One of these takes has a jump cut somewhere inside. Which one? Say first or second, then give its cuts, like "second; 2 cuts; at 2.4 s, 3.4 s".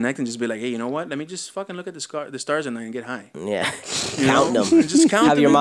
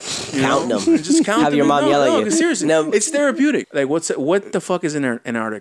second; 1 cut; at 3.7 s